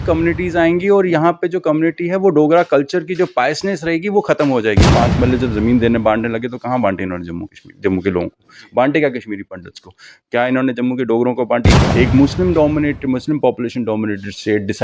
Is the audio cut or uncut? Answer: cut